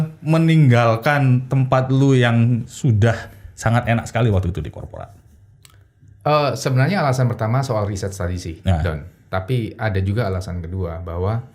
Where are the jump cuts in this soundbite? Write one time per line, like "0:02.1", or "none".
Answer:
none